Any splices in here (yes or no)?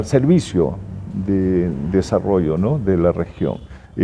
no